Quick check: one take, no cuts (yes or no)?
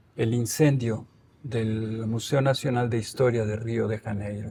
yes